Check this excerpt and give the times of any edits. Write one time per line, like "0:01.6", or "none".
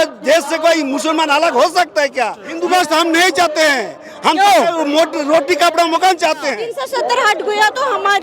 0:02.5
0:06.7